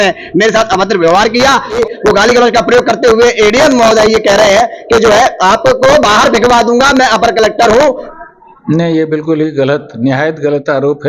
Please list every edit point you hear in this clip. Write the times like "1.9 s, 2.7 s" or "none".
1.8 s, 8.0 s